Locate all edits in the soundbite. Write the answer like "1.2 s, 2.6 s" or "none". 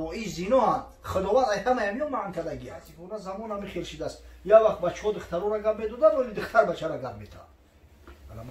3.0 s